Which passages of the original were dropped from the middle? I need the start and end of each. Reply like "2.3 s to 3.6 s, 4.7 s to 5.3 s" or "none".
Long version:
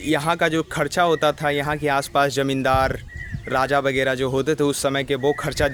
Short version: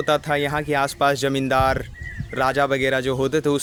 none